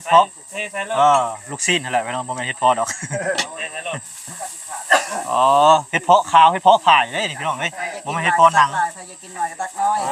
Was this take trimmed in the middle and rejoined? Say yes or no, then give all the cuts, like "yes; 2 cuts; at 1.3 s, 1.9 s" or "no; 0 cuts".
no; 0 cuts